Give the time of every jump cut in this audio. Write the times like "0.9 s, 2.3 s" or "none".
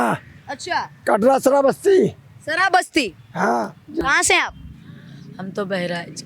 4.0 s